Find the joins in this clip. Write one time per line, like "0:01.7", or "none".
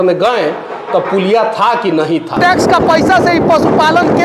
0:02.4